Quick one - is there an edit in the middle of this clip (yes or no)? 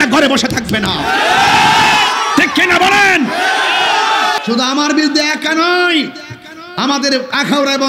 yes